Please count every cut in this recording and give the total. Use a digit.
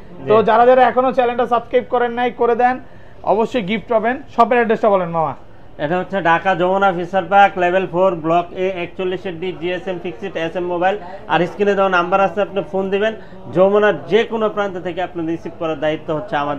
0